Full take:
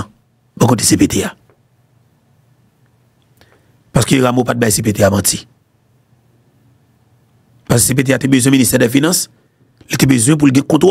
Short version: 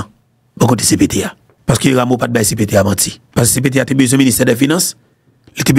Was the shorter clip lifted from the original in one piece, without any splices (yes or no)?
no